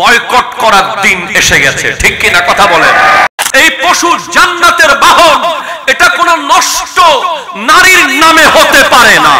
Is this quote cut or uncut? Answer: cut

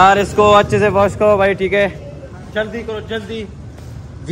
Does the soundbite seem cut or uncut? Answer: uncut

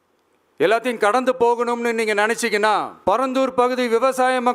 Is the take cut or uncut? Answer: cut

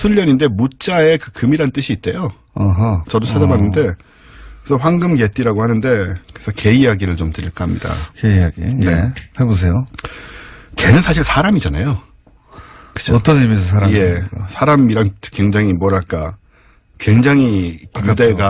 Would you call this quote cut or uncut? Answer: uncut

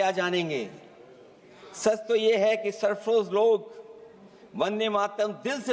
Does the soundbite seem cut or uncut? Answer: uncut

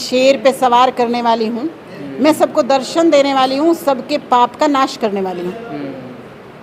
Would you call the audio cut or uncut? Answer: uncut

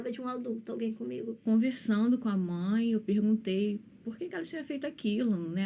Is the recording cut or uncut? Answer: cut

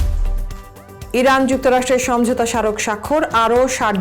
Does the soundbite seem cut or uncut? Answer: cut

